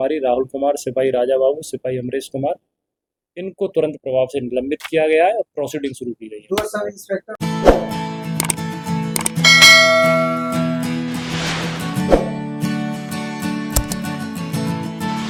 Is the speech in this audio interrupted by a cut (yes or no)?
no